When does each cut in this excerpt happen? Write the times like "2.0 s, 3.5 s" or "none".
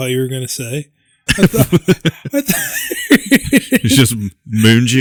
none